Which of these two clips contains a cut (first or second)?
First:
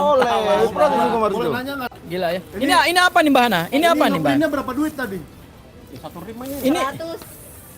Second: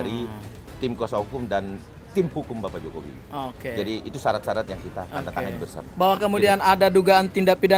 first